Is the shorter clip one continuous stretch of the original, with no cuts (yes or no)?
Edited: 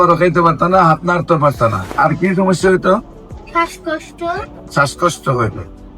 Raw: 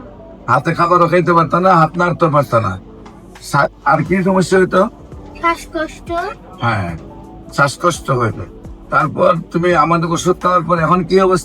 no